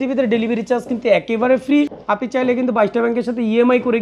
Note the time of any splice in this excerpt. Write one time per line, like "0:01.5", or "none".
0:01.9